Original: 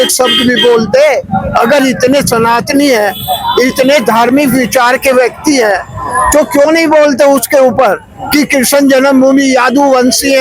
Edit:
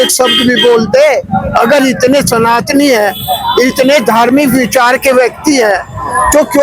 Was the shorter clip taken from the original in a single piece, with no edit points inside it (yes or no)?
yes